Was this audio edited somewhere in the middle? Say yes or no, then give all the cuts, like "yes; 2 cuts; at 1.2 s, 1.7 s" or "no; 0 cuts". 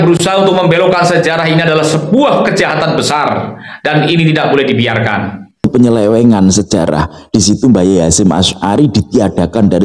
yes; 1 cut; at 5.7 s